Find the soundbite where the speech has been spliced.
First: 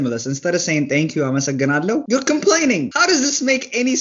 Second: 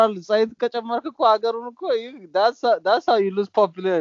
first; 2 cuts; at 2.0 s, 2.9 s

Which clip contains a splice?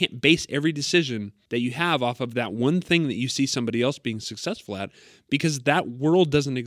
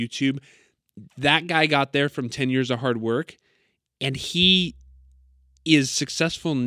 first; 1 cut; at 1.3 s

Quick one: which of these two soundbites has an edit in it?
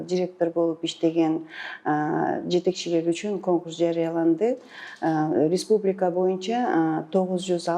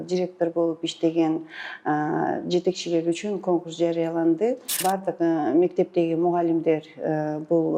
second; 1 cut; at 4.8 s

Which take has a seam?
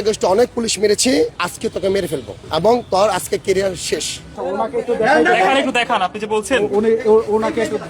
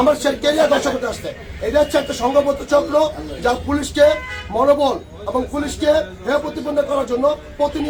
first; 3 cuts; at 1.4 s, 2.4 s, 4.4 s

